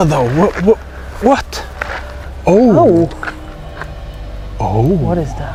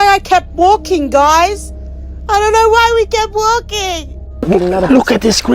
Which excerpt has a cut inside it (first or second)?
second